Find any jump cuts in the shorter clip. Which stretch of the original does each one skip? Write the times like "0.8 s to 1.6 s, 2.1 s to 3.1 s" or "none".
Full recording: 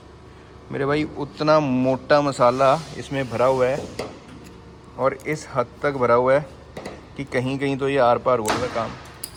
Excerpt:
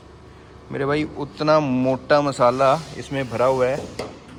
none

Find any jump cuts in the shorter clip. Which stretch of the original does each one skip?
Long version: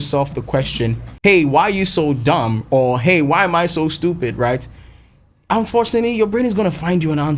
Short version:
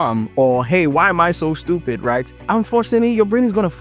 4.7 s to 5.4 s

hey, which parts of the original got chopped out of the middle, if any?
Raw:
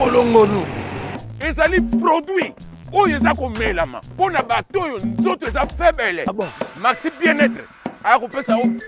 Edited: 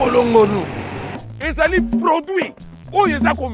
none

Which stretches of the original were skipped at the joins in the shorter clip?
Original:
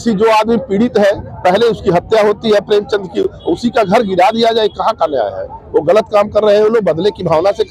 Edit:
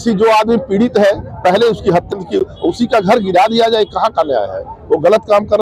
2.1 s to 2.9 s

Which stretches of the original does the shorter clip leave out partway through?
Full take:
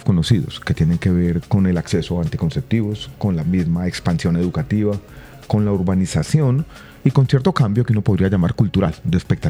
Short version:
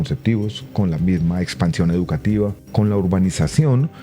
5.1 s to 5.4 s

